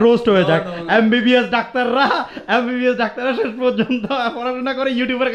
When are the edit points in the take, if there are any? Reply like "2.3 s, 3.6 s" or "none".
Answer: none